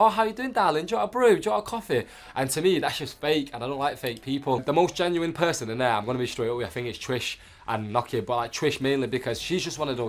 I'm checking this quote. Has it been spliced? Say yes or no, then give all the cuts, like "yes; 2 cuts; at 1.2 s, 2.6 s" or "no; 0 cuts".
no; 0 cuts